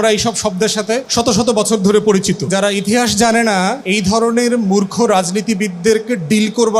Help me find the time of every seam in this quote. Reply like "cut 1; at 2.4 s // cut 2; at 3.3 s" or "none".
cut 1; at 1.1 s // cut 2; at 2.5 s // cut 3; at 3.8 s